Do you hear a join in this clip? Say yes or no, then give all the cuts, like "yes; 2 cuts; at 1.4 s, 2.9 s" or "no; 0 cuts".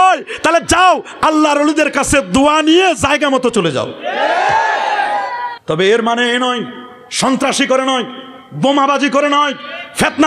yes; 1 cut; at 5.5 s